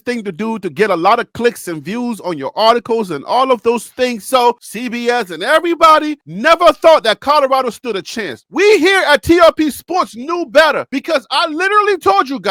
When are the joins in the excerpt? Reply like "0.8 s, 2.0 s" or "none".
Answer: none